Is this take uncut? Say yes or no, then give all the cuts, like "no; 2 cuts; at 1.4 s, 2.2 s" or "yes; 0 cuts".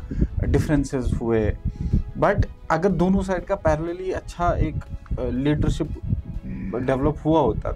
yes; 0 cuts